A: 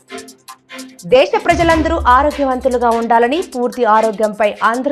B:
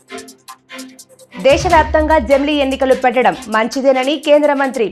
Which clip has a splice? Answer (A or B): A